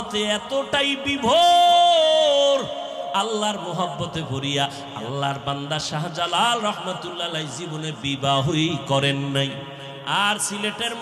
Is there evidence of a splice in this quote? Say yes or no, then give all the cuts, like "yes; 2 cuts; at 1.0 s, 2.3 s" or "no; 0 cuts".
no; 0 cuts